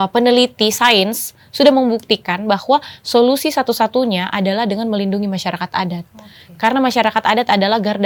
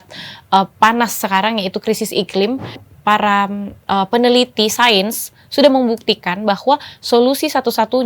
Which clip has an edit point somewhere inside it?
second; 1 cut; at 2.8 s

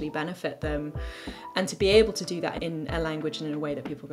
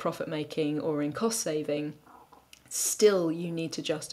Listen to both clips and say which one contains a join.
first; 1 cut; at 2.6 s

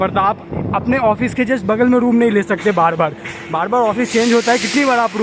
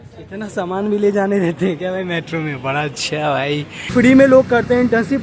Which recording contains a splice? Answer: second; 1 cut; at 3.9 s

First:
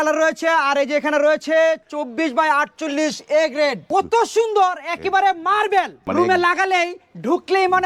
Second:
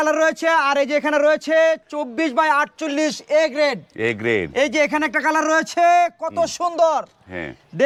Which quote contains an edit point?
first; 2 cuts; at 3.9 s, 6.0 s

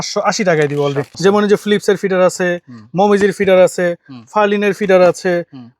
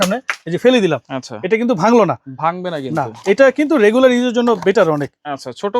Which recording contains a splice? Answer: first; 1 cut; at 1.1 s

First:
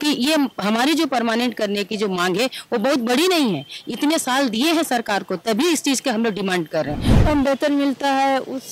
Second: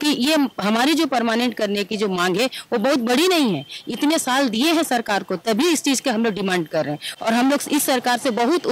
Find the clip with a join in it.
first; 1 cut; at 7.1 s

